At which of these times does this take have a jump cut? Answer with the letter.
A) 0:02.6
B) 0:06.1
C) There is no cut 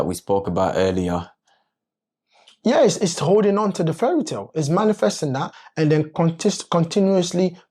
C